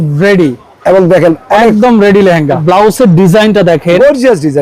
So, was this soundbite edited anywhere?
yes; 1 cut; at 2.6 s

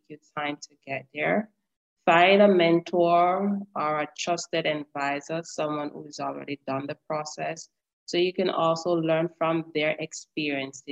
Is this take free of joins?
yes; 0 cuts

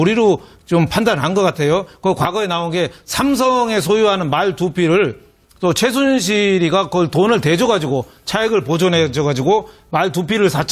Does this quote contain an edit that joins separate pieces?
no; 0 cuts

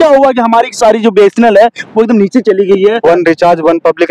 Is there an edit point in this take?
yes; 1 cut; at 3.0 s

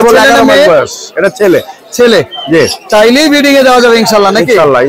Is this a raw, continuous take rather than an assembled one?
yes; 0 cuts

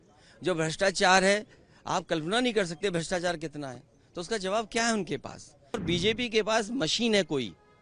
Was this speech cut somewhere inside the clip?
yes; 1 cut; at 5.8 s

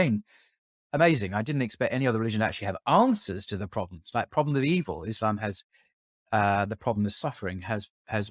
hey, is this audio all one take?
yes; 0 cuts

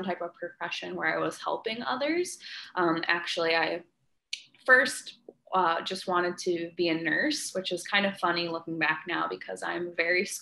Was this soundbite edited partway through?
no; 0 cuts

